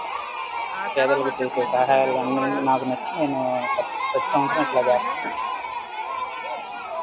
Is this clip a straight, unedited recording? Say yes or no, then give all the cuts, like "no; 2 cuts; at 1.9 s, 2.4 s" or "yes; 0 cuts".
no; 1 cut; at 5.0 s